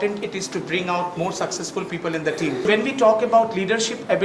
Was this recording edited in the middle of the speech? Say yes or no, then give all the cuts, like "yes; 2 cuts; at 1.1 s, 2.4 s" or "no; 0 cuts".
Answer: yes; 1 cut; at 2.6 s